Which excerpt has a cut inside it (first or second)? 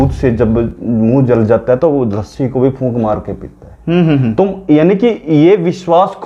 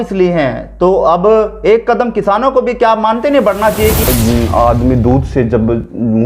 second